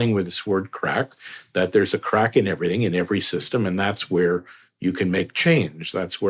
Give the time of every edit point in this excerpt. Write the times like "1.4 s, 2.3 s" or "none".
none